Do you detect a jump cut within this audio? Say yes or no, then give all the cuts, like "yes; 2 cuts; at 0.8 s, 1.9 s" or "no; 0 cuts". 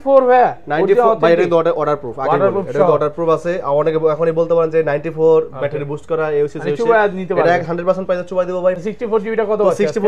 yes; 1 cut; at 8.8 s